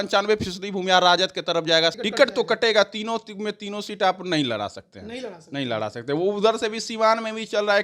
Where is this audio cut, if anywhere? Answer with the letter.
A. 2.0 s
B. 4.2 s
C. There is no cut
A